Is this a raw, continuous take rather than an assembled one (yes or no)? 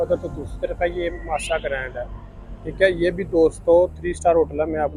yes